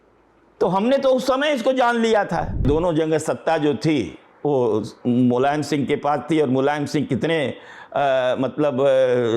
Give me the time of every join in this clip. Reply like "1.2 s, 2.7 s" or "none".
2.6 s